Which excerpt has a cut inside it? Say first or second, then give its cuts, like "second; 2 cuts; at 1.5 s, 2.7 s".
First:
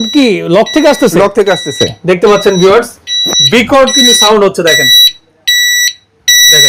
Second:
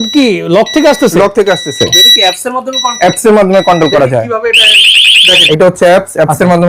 second; 2 cuts; at 2.0 s, 5.4 s